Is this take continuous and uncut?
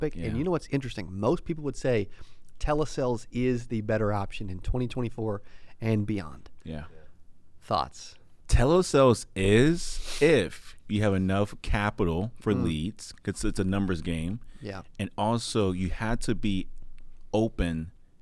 no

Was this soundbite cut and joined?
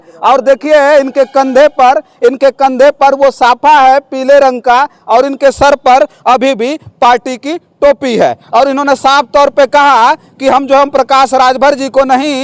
no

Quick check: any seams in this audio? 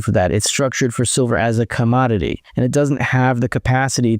yes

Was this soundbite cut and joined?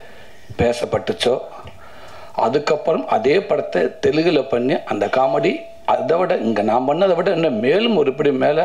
no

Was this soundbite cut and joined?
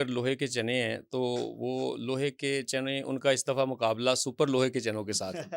no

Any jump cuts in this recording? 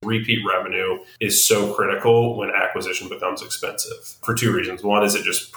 yes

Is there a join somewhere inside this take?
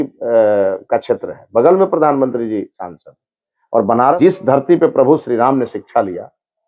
yes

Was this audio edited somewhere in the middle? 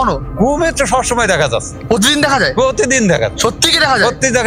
no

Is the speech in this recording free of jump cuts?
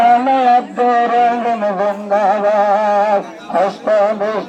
yes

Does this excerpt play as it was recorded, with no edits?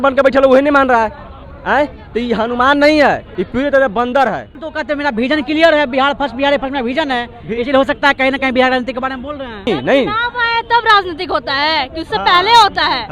no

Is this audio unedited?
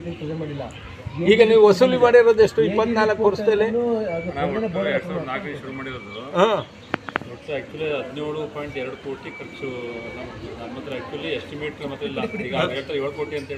yes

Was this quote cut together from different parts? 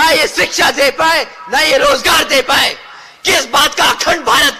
no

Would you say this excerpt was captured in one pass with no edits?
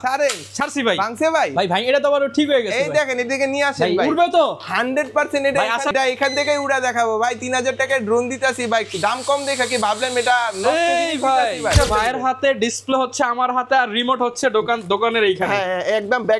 no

